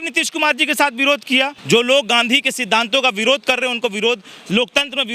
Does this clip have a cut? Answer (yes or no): yes